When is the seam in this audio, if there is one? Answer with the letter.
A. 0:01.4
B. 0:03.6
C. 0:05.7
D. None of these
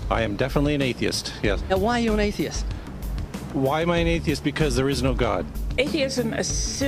D